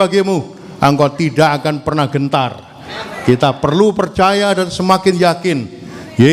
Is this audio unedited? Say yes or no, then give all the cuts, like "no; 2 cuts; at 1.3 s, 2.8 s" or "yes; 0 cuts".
yes; 0 cuts